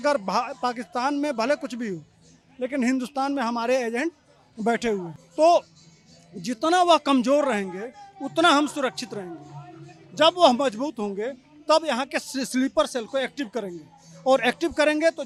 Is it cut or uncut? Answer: uncut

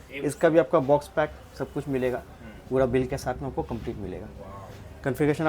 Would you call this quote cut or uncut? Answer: uncut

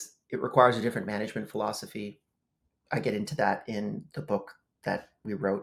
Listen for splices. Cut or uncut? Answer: uncut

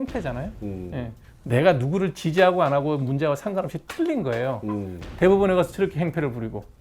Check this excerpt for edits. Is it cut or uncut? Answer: cut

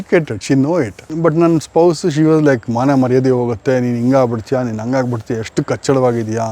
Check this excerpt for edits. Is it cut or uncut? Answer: cut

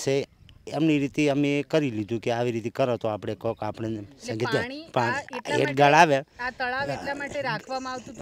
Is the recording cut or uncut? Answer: uncut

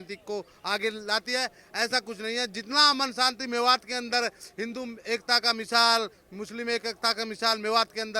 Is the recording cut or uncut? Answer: uncut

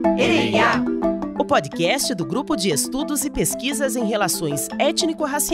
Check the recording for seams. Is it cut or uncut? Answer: uncut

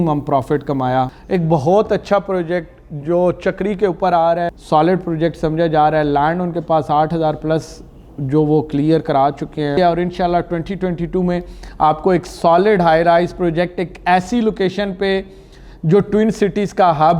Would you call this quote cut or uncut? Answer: cut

